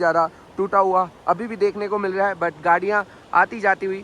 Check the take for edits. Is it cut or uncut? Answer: uncut